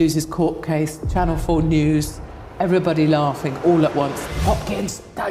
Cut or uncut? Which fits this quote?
cut